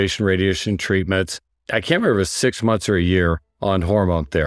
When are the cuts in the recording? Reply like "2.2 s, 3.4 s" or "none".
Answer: 3.5 s